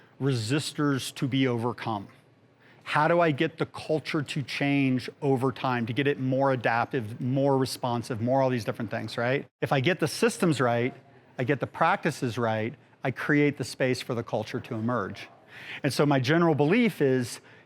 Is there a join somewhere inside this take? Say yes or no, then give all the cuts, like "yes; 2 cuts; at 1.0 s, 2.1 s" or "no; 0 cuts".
yes; 1 cut; at 9.5 s